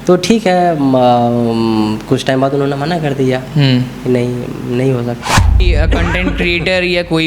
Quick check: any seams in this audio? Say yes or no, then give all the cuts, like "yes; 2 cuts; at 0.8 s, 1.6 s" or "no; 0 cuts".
yes; 1 cut; at 5.7 s